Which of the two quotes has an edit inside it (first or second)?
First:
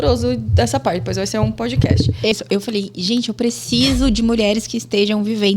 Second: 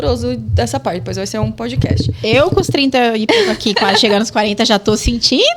first